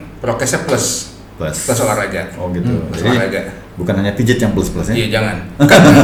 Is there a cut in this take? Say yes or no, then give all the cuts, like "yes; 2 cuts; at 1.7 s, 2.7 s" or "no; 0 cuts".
no; 0 cuts